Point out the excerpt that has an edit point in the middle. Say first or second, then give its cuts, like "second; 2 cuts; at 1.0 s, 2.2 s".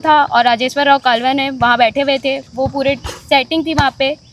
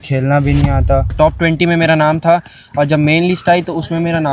second; 1 cut; at 1.1 s